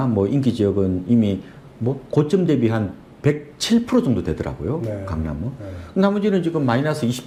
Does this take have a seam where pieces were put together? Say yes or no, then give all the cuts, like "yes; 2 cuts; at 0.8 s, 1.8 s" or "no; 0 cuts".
no; 0 cuts